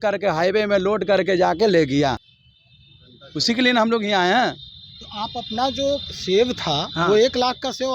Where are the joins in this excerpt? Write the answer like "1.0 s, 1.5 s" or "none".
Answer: none